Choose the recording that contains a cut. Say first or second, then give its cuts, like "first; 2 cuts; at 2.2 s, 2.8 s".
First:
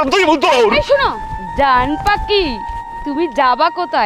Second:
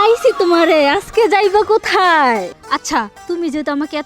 second; 1 cut; at 2.5 s